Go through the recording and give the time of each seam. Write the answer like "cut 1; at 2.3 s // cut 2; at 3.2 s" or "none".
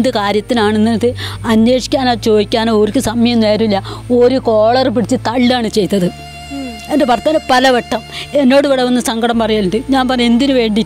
none